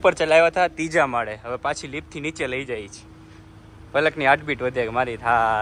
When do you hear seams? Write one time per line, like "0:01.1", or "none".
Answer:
none